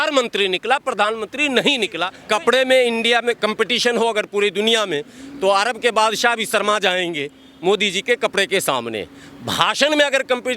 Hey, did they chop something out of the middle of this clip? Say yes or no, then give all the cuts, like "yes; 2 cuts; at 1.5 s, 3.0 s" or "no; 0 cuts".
yes; 1 cut; at 2.1 s